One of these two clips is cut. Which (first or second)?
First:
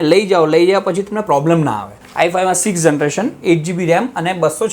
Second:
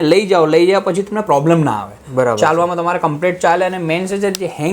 first